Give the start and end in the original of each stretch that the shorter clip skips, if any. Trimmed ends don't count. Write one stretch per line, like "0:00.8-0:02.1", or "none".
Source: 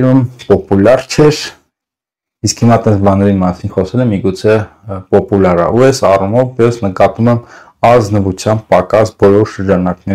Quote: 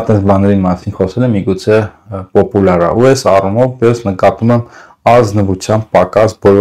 none

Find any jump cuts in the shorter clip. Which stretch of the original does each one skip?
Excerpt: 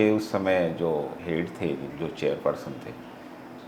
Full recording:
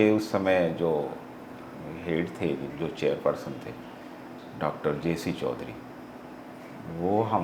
0:01.2-0:02.0

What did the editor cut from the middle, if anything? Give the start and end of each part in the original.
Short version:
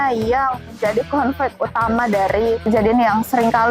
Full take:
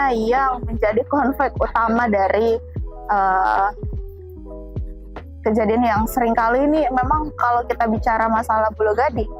0:02.7-0:05.5

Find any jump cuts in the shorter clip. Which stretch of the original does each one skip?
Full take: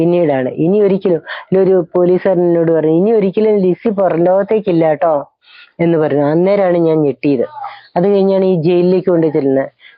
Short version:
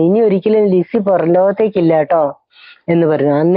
none

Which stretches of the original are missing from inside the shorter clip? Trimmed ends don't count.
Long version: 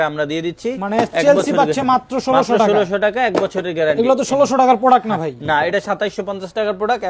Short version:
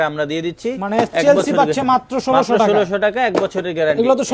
none

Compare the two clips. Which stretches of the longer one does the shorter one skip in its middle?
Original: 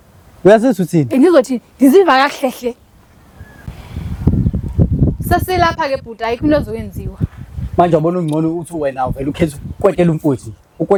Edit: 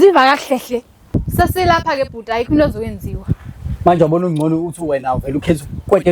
0:03.1-0:05.1

